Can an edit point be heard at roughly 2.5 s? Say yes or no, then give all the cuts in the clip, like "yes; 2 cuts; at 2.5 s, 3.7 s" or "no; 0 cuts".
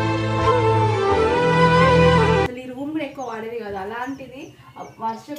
yes; 1 cut; at 2.5 s